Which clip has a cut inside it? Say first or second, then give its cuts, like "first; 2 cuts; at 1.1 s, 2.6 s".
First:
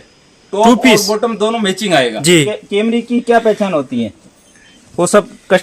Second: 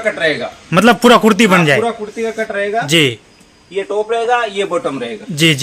first; 1 cut; at 2.5 s